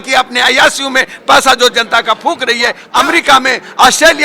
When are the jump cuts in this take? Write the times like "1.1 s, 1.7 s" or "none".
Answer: 2.8 s